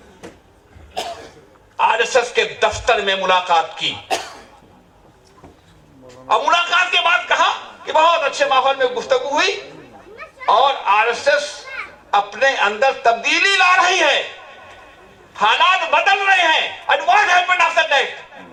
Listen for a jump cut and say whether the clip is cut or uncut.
uncut